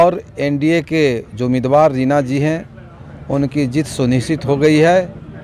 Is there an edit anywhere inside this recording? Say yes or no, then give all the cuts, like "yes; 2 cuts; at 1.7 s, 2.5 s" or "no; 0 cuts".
no; 0 cuts